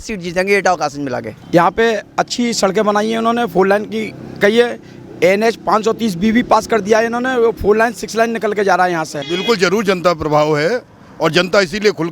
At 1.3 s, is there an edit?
yes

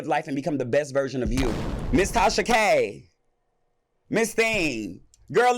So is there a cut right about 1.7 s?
yes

